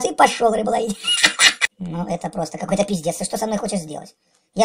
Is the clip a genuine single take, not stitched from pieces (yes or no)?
no